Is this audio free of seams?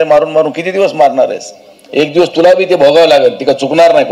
yes; 0 cuts

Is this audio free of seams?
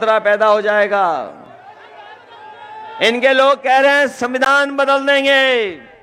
yes; 0 cuts

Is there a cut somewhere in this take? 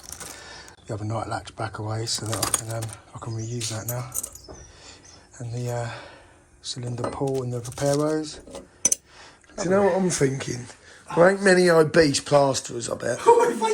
yes; 1 cut; at 9.7 s

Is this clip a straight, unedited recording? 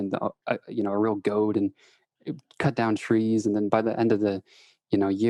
yes; 0 cuts

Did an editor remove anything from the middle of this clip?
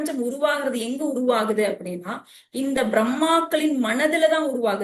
no; 0 cuts

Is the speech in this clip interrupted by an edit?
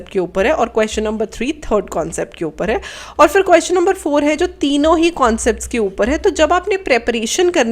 no; 0 cuts

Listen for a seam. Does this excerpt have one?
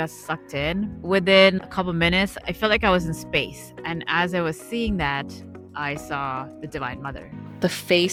no; 0 cuts

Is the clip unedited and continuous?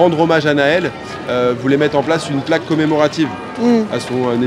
yes; 0 cuts

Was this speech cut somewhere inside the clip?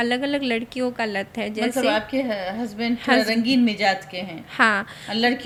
no; 0 cuts

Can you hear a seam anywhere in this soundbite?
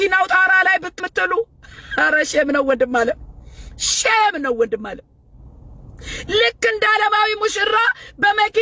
yes; 1 cut; at 1.0 s

